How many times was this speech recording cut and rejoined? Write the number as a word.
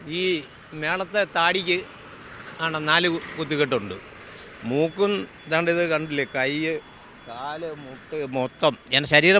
zero